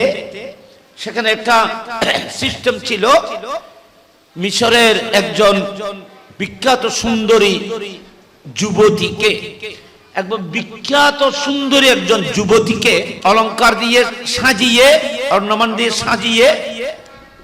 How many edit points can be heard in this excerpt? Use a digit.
1